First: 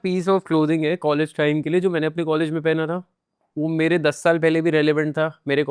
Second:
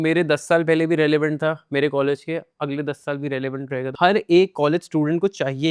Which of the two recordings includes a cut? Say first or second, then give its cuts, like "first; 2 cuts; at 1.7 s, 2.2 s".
second; 1 cut; at 3.9 s